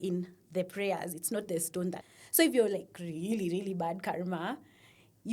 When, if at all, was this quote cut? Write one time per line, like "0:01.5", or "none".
0:02.1